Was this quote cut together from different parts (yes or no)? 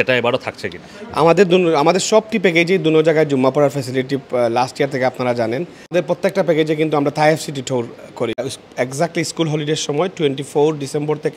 yes